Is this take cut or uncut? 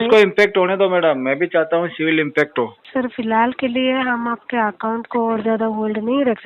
cut